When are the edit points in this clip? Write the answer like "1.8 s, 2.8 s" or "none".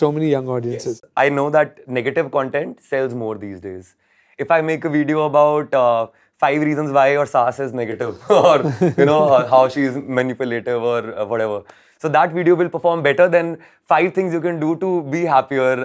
0.9 s